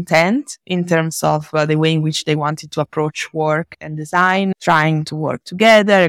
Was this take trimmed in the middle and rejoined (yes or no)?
no